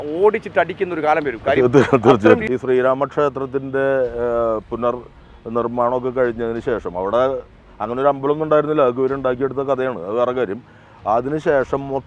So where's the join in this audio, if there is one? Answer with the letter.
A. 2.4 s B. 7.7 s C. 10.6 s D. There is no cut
A